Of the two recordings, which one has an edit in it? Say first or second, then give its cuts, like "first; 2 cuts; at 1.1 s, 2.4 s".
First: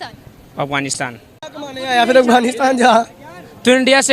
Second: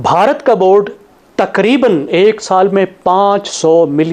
first; 1 cut; at 1.4 s